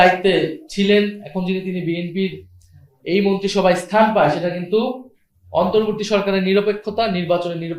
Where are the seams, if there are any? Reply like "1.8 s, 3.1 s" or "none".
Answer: none